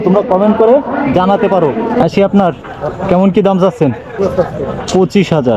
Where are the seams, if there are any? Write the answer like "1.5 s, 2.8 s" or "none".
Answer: 2.0 s, 2.7 s, 4.2 s

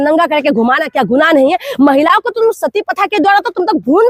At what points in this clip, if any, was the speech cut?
none

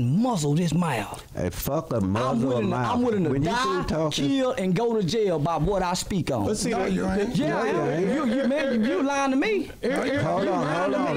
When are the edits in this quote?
none

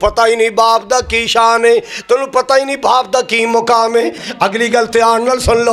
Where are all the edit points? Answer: 4.2 s

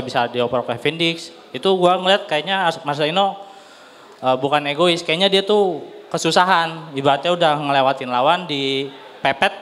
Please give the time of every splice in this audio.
none

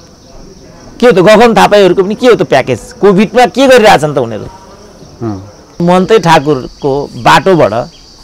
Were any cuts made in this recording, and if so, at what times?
5.8 s

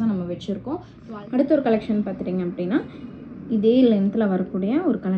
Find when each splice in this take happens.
0.9 s

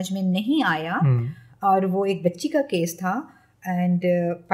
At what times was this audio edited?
none

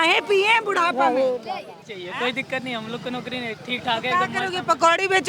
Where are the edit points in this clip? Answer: 1.9 s

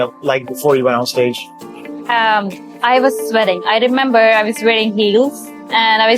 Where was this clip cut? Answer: none

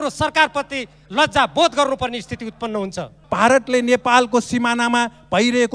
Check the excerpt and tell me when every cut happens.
3.2 s

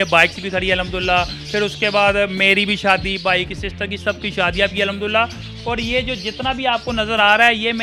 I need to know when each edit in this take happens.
none

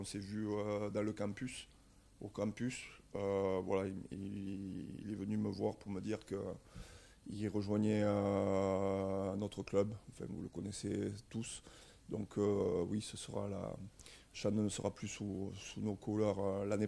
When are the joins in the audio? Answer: none

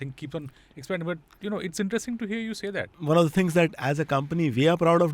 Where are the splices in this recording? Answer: 3.0 s

